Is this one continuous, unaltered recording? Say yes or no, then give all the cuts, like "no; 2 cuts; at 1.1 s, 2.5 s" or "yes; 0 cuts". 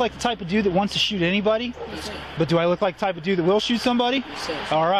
yes; 0 cuts